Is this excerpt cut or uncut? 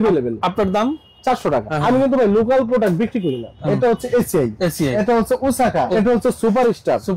cut